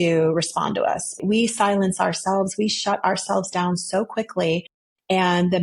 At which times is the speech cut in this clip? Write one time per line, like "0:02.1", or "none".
0:01.2